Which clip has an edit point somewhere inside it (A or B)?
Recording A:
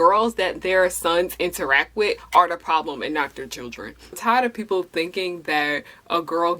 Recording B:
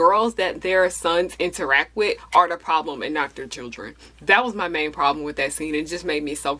A